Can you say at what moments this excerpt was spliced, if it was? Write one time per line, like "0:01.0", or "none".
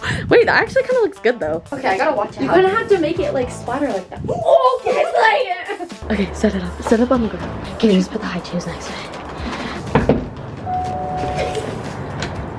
0:01.7
0:05.9
0:09.8
0:11.8